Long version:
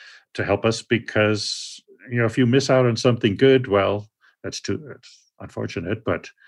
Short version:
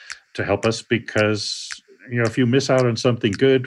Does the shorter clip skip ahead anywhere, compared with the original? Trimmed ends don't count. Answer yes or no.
no